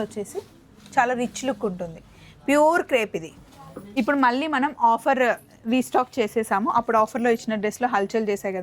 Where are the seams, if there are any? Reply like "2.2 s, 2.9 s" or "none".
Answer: 3.8 s